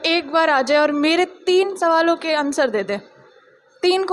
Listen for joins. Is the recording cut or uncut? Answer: uncut